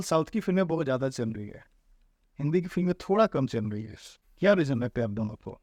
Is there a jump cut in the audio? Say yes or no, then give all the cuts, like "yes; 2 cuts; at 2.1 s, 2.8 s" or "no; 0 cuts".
no; 0 cuts